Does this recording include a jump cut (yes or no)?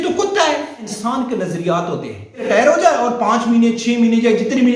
yes